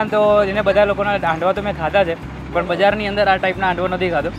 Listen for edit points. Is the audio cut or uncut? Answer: cut